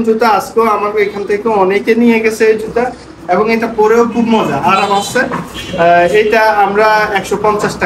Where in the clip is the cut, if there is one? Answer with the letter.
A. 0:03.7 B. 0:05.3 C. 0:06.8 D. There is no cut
D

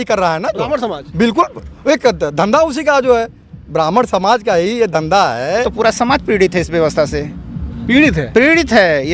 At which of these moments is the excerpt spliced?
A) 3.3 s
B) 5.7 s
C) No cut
B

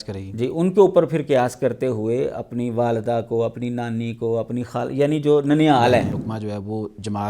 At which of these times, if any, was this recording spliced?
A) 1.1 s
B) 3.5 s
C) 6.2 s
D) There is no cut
C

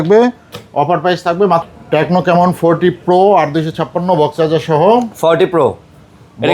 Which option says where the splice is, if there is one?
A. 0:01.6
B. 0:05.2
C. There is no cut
A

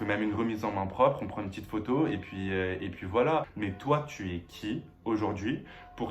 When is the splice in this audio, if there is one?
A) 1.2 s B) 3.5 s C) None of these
B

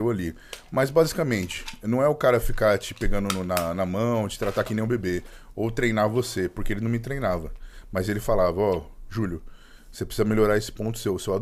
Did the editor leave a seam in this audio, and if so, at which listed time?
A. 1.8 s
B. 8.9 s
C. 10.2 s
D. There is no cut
D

